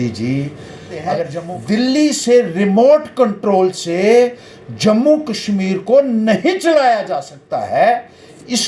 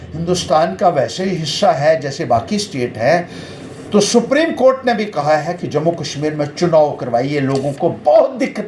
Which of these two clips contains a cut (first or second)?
first